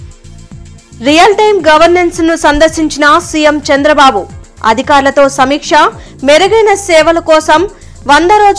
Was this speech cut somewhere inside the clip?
yes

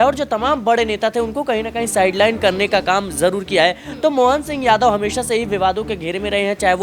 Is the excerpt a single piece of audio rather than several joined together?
yes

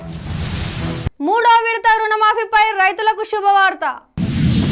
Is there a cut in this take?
yes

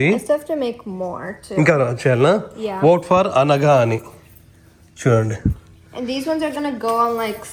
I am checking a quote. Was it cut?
no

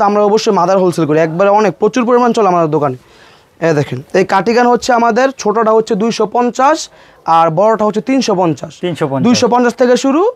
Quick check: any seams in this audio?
no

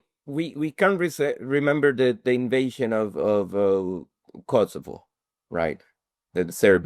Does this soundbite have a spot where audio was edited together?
no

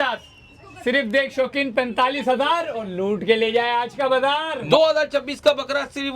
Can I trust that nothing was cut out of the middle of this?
no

